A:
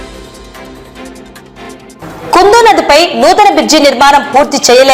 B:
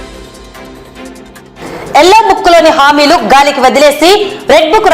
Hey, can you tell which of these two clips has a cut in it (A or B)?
A